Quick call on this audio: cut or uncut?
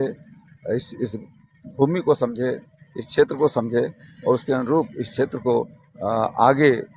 uncut